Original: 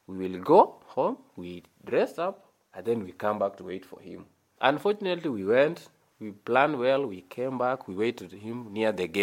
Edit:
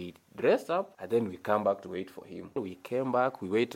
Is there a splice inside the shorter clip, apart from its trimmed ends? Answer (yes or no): yes